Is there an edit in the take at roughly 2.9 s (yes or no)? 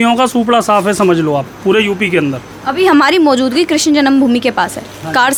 no